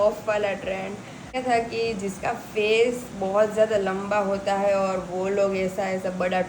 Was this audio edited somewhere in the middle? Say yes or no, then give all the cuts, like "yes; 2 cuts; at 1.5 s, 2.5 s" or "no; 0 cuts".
yes; 1 cut; at 1.4 s